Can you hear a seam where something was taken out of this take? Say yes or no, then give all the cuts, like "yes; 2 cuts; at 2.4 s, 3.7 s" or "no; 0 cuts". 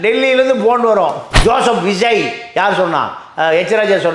yes; 1 cut; at 1.3 s